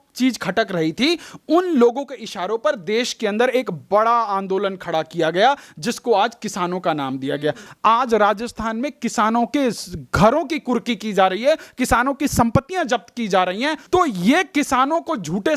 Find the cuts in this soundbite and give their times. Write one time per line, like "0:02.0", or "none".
0:07.7
0:13.8